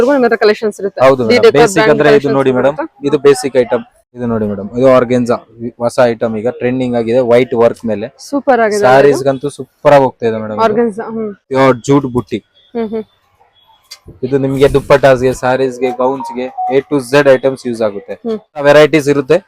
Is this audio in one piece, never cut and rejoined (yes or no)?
no